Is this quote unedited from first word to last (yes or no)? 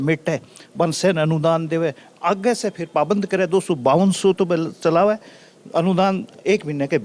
yes